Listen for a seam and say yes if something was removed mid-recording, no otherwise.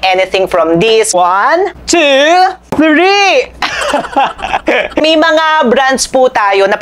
yes